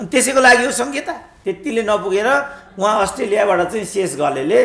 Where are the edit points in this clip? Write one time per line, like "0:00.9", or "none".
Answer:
0:01.2